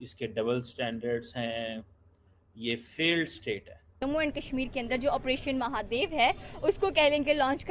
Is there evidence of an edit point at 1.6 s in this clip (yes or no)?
no